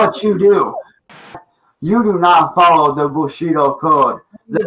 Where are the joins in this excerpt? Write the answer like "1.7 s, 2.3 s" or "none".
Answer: 1.3 s